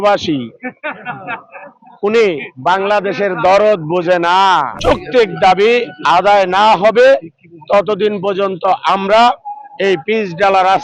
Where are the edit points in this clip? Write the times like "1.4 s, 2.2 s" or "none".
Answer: 4.7 s

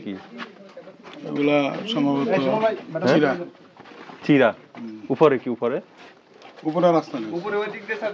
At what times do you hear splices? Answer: none

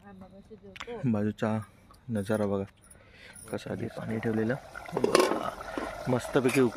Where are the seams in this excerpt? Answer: 3.9 s

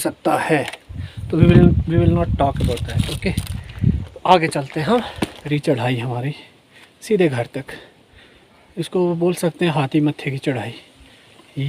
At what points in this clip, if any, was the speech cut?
5.4 s

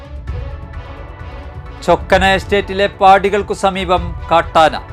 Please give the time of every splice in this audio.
none

